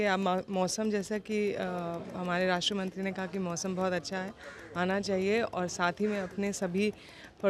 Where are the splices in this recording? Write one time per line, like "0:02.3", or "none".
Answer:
none